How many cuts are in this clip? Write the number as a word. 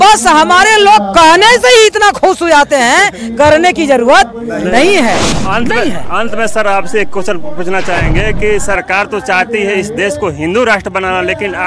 one